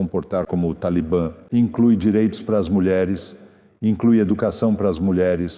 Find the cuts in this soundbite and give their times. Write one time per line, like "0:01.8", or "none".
0:01.4